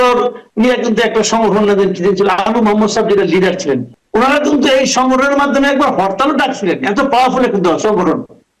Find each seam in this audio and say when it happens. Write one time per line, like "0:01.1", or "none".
0:03.9